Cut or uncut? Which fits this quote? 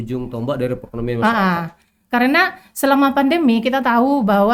uncut